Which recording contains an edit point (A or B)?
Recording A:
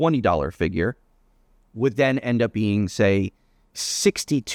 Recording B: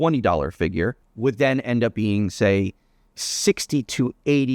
B